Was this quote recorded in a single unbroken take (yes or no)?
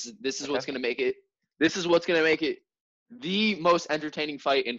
yes